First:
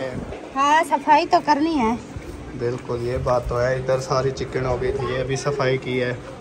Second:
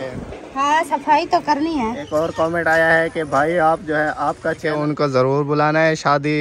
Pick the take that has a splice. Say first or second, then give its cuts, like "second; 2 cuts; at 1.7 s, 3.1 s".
second; 2 cuts; at 2.0 s, 4.7 s